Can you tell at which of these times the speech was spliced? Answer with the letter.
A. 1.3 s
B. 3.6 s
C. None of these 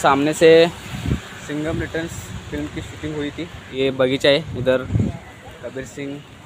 B